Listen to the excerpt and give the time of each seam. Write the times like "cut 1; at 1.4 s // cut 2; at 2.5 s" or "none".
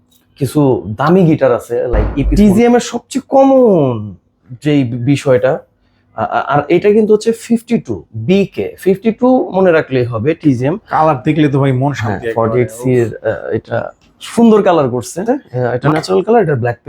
cut 1; at 2.3 s // cut 2; at 10.8 s // cut 3; at 15.2 s

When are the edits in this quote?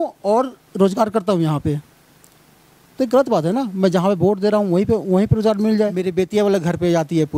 cut 1; at 6.1 s

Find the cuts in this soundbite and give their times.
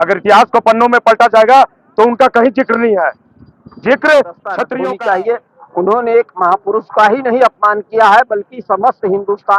cut 1; at 4.7 s

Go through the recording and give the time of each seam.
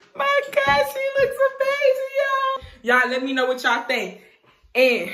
cut 1; at 2.7 s

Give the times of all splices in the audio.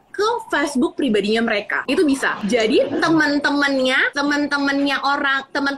cut 1; at 1.7 s // cut 2; at 2.4 s // cut 3; at 4.1 s

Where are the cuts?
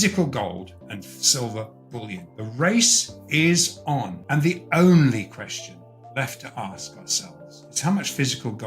cut 1; at 2.3 s // cut 2; at 4.2 s // cut 3; at 7.6 s

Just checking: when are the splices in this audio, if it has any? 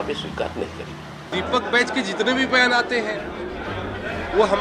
cut 1; at 1.3 s

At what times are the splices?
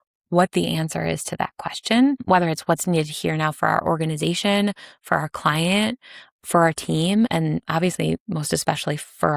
cut 1; at 2.2 s // cut 2; at 7.3 s

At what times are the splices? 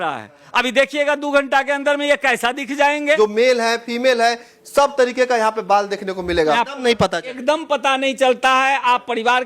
cut 1; at 3.2 s // cut 2; at 6.6 s

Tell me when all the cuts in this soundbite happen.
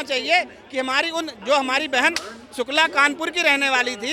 none

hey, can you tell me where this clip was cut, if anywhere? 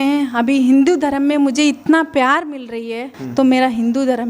cut 1; at 3.2 s

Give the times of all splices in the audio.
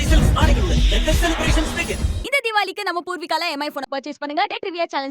none

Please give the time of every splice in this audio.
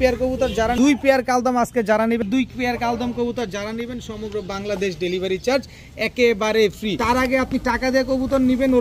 cut 1; at 0.7 s // cut 2; at 2.2 s // cut 3; at 7.0 s

